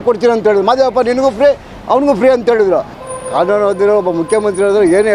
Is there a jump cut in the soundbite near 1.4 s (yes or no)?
no